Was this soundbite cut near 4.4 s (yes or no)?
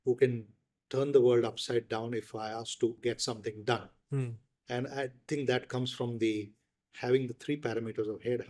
no